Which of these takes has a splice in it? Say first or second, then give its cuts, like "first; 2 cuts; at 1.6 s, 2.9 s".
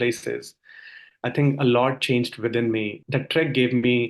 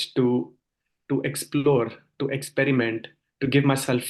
first; 1 cut; at 3.0 s